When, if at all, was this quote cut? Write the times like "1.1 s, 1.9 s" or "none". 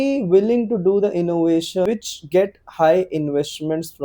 1.9 s